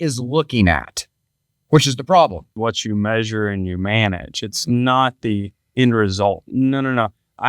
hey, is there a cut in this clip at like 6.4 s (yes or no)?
yes